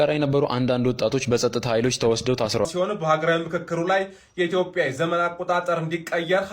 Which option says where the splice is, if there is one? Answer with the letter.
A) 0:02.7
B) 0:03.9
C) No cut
A